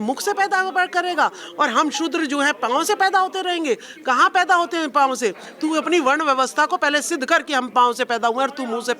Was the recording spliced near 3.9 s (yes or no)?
no